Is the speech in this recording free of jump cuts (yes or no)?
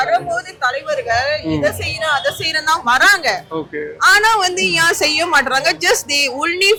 yes